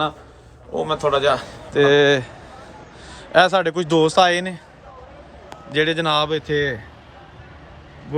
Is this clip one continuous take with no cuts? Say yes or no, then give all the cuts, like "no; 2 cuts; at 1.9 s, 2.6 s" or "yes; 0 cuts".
no; 1 cut; at 1.5 s